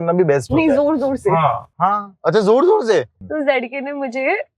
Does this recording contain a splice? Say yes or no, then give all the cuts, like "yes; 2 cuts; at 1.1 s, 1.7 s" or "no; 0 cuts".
yes; 1 cut; at 3.1 s